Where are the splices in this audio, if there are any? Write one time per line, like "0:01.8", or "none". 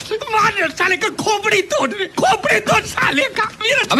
none